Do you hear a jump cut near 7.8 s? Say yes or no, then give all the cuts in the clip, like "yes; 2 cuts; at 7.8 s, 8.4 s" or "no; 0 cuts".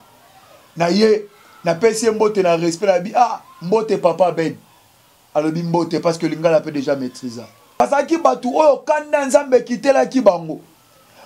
yes; 1 cut; at 7.8 s